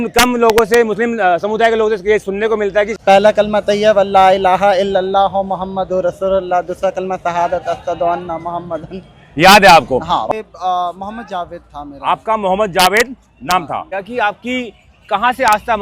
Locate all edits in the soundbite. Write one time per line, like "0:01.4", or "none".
0:02.9
0:10.2
0:14.0